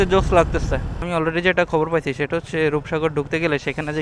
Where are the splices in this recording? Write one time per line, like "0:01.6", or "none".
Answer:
0:01.0